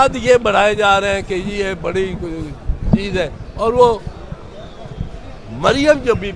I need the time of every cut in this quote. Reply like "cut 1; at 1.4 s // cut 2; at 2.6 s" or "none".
none